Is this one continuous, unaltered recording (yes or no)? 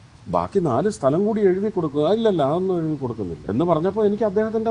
no